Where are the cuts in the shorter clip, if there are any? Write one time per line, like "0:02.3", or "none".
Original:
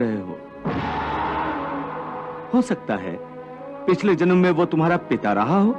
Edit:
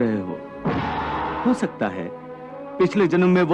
0:01.4